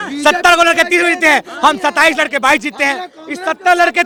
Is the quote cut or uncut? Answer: uncut